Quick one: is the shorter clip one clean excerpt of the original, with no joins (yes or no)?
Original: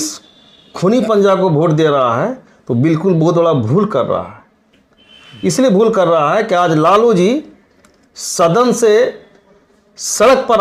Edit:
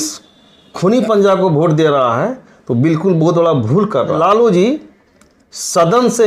no